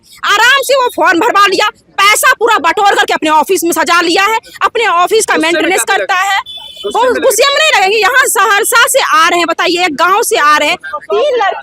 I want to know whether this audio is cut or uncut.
uncut